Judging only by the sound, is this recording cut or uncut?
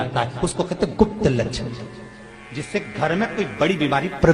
uncut